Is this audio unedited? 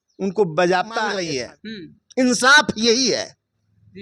no; 1 cut; at 1.2 s

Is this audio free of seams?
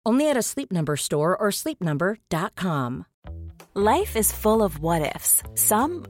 no; 1 cut; at 3.1 s

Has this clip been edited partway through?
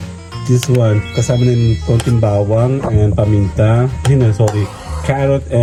no; 0 cuts

